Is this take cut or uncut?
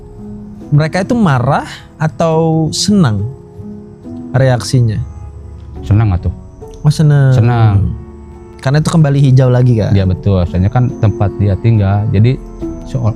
uncut